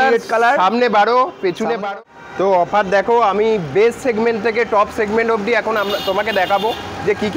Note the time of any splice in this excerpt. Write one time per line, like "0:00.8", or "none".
0:01.9